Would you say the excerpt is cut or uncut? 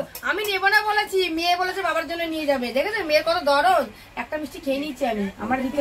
uncut